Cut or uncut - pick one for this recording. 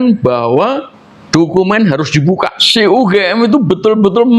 cut